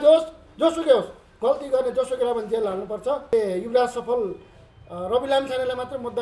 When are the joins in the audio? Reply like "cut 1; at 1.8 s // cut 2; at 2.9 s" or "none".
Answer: cut 1; at 3.3 s

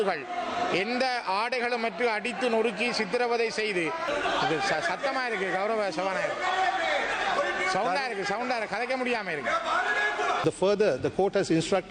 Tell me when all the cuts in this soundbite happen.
cut 1; at 4.0 s // cut 2; at 10.4 s

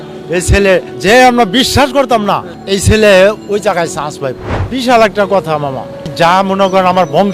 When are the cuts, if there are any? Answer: cut 1; at 0.9 s // cut 2; at 2.5 s // cut 3; at 4.5 s // cut 4; at 6.1 s

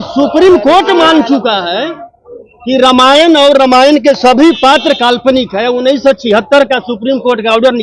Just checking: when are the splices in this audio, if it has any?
none

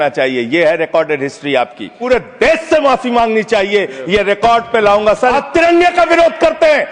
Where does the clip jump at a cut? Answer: cut 1; at 1.9 s // cut 2; at 5.0 s

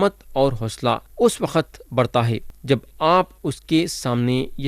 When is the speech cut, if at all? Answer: cut 1; at 1.1 s // cut 2; at 2.5 s

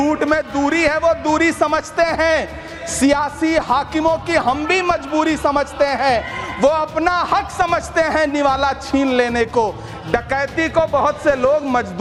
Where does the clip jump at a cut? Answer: none

